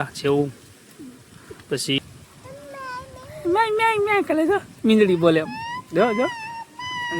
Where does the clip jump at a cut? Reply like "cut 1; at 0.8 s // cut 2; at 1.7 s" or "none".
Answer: cut 1; at 2.0 s